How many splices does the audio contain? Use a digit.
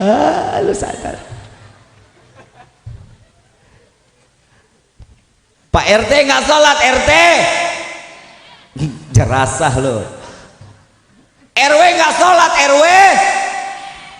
0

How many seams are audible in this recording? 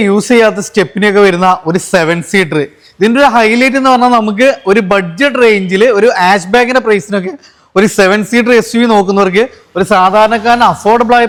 0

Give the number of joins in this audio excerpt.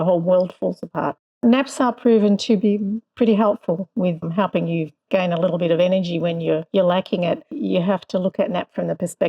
5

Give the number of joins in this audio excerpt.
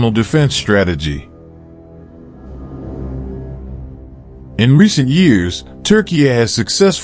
2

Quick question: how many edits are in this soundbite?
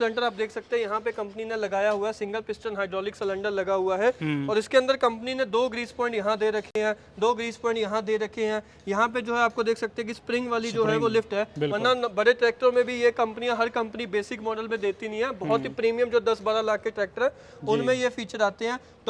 0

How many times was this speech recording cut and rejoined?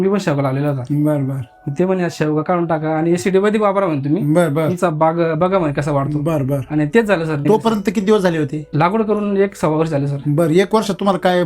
2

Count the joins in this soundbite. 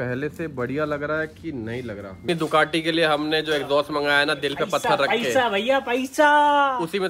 1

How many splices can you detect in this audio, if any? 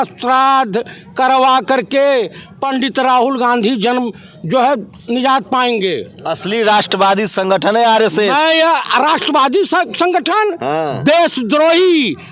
0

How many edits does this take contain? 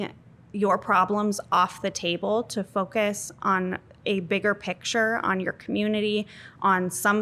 0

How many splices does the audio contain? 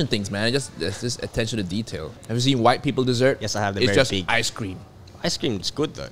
1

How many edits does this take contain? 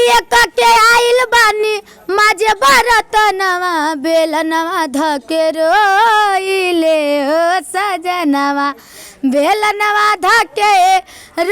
0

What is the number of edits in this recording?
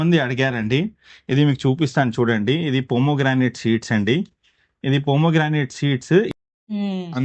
1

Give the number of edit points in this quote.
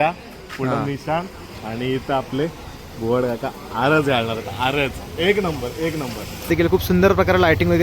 1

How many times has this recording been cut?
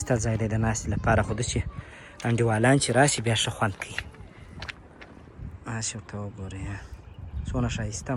0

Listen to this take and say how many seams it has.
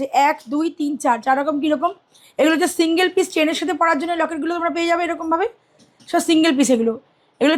0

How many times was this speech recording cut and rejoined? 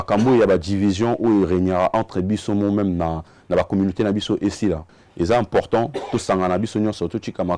1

